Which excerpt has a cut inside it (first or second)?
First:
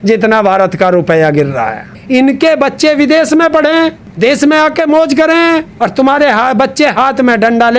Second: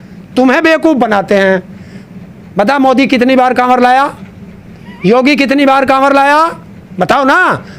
first